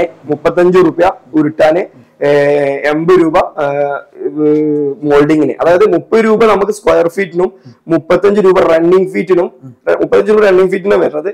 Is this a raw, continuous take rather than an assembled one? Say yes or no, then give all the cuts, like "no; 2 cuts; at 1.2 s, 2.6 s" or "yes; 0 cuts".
yes; 0 cuts